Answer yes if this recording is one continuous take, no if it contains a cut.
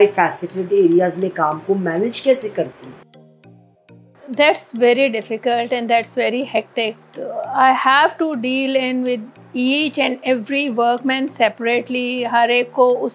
yes